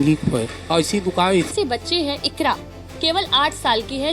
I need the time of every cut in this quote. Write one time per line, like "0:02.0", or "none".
0:01.5